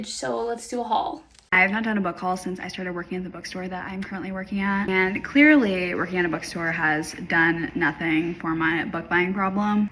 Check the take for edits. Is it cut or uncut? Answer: uncut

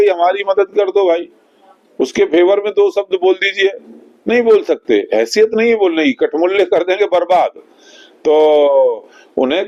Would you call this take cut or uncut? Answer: uncut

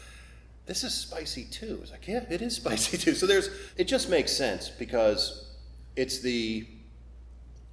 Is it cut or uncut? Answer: cut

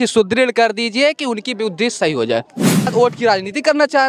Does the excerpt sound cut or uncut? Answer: cut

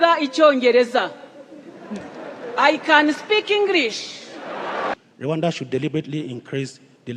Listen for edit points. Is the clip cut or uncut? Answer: cut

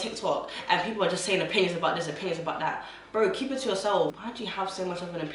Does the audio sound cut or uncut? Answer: cut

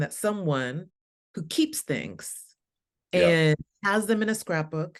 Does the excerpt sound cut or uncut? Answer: uncut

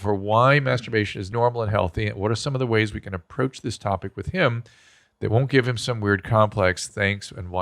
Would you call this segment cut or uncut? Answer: cut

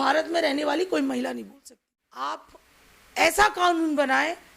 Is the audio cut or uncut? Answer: cut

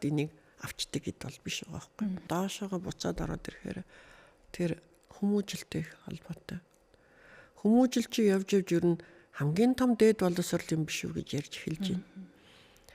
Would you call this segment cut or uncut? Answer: cut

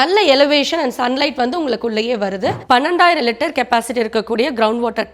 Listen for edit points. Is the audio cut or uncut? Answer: cut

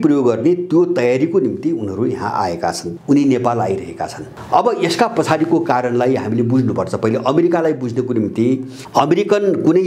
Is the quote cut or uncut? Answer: cut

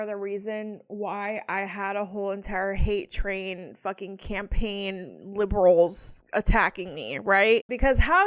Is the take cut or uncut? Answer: uncut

